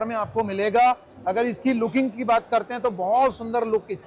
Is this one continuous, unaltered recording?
yes; 0 cuts

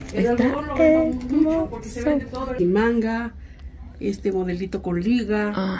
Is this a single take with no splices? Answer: no; 1 cut; at 2.5 s

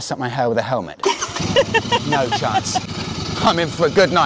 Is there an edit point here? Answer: yes; 1 cut; at 2.9 s

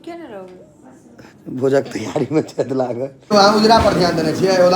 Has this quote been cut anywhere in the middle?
yes; 1 cut; at 3.3 s

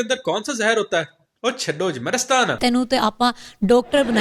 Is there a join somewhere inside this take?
yes; 1 cut; at 2.6 s

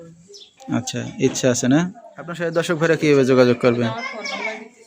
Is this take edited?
yes; 1 cut; at 2.5 s

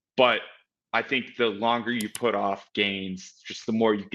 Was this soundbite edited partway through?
no; 0 cuts

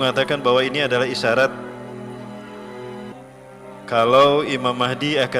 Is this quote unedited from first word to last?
no; 2 cuts; at 2.0 s, 3.5 s

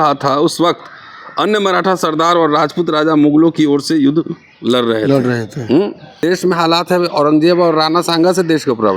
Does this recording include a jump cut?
yes; 1 cut; at 6.2 s

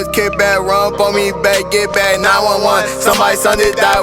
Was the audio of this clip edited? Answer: no; 0 cuts

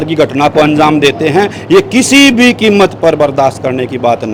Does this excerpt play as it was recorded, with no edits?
yes; 0 cuts

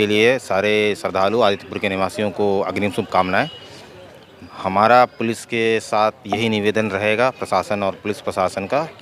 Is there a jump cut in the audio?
no; 0 cuts

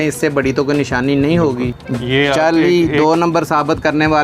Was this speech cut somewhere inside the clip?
yes; 1 cut; at 1.7 s

